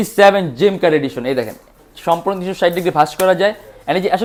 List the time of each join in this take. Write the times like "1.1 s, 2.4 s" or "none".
none